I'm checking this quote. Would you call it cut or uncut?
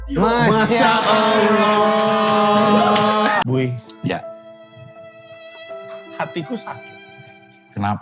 cut